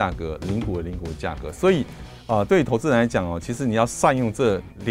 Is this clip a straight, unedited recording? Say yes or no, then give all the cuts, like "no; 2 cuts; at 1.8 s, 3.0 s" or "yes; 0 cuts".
yes; 0 cuts